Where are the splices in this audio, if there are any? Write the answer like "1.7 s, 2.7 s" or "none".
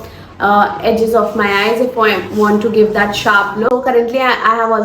3.7 s